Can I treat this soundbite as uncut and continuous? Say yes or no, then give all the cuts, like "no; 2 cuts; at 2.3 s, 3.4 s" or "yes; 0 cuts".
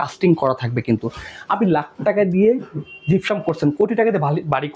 yes; 0 cuts